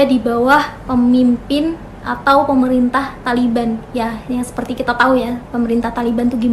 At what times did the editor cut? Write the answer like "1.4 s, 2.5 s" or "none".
none